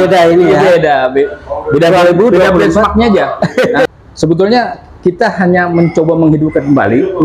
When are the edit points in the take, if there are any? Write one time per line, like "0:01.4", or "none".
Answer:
0:03.9